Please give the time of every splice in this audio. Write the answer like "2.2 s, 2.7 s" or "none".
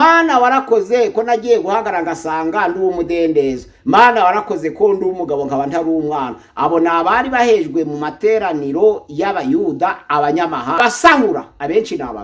10.8 s